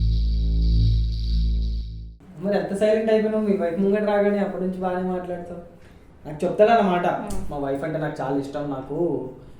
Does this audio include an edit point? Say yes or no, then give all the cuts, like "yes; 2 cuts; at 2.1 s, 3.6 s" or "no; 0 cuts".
yes; 1 cut; at 2.1 s